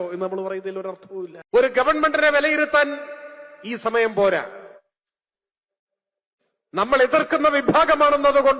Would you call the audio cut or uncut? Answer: cut